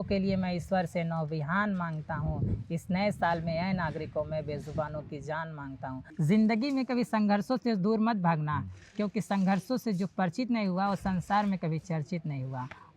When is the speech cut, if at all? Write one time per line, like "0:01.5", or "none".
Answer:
0:06.1